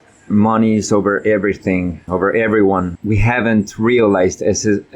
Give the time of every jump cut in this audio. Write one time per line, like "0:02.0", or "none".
0:02.0
0:02.9